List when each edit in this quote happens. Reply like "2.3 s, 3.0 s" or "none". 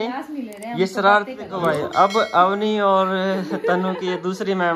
1.4 s